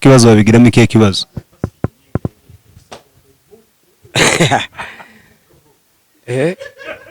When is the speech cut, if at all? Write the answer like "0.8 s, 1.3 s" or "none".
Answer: none